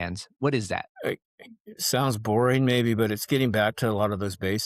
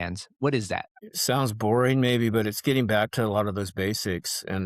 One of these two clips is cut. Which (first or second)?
second